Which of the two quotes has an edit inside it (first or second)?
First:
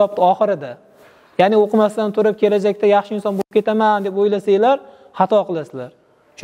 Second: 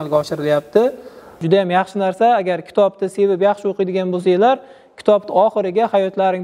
second